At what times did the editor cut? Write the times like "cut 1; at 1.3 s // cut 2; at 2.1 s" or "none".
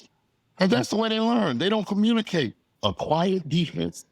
cut 1; at 2.6 s